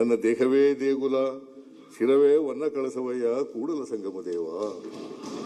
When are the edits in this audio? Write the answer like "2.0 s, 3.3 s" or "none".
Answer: none